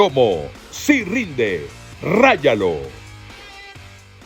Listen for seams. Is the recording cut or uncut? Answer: cut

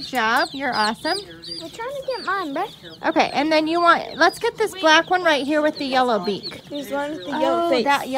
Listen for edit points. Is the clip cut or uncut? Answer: uncut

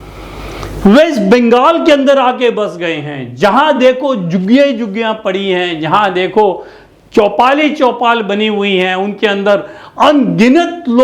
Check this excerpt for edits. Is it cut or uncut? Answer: uncut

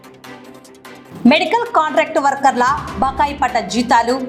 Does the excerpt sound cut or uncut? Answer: uncut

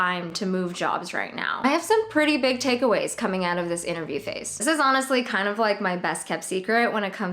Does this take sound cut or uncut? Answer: cut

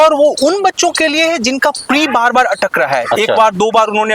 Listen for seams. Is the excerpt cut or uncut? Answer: uncut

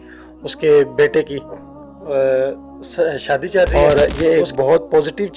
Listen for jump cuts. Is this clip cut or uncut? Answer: cut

